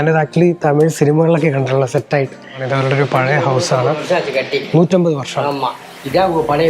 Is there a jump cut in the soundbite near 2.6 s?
yes; 1 cut; at 2.6 s

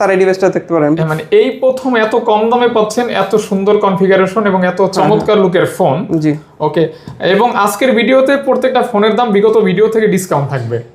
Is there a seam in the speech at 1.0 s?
yes; 1 cut; at 1.0 s

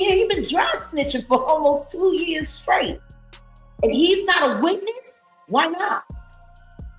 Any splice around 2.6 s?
no; 1 cut; at 6.1 s

